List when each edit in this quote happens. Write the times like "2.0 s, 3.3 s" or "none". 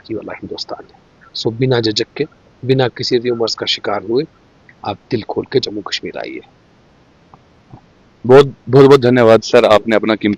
none